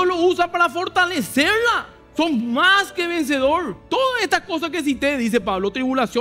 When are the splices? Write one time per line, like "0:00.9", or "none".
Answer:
0:01.9
0:03.8